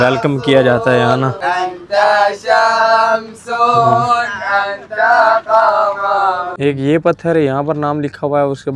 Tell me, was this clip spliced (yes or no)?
yes